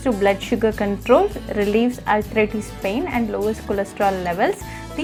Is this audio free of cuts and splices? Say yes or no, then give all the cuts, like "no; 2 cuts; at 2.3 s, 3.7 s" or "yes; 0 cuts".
yes; 0 cuts